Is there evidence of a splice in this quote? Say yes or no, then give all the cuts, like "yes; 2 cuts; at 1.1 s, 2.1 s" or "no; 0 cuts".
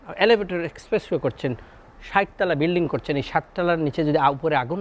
no; 0 cuts